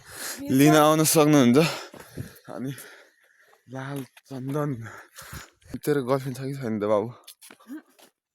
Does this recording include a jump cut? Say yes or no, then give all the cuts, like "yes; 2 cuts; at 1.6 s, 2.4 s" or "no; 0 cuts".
yes; 1 cut; at 5.7 s